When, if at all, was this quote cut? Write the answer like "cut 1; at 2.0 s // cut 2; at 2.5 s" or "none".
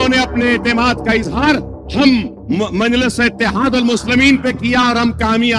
none